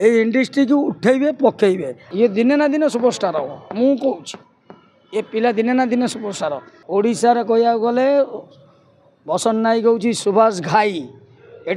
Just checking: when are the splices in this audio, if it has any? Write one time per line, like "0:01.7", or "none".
0:02.1
0:06.7